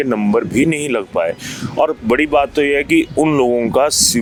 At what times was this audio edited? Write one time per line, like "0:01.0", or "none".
none